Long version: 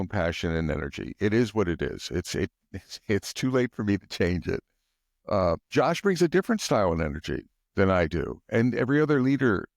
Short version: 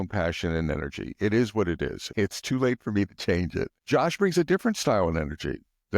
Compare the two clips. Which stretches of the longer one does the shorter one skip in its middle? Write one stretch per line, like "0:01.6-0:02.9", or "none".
0:02.0-0:02.9
0:04.7-0:05.6

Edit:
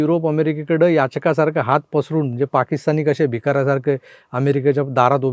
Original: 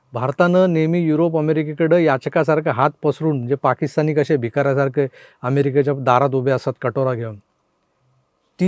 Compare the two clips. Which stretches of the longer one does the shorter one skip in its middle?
none

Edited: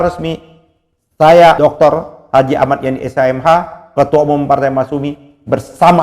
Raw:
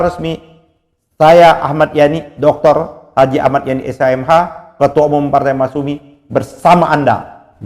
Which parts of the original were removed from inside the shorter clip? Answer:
0:01.6-0:02.4

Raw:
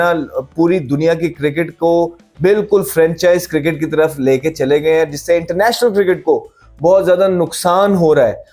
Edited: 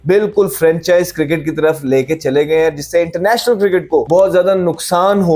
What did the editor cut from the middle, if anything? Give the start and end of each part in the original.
0:06.4-0:06.8

